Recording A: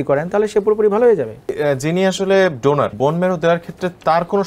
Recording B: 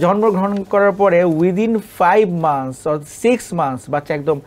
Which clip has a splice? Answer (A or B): A